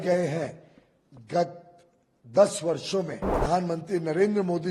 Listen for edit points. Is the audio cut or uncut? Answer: cut